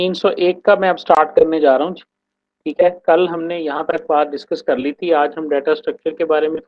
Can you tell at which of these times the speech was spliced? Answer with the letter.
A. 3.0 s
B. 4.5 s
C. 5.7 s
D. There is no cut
D